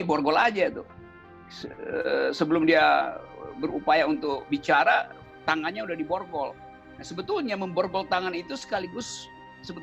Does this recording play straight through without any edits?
yes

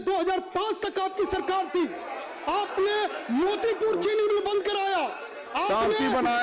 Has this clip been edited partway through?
no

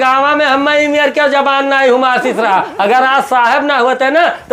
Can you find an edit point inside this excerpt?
no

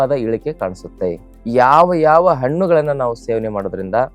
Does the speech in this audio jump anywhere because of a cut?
yes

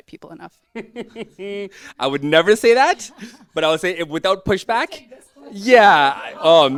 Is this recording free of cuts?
yes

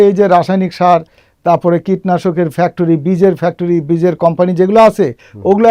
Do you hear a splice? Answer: no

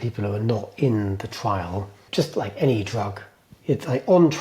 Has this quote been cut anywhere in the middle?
yes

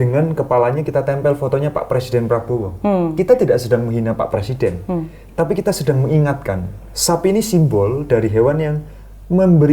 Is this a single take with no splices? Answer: yes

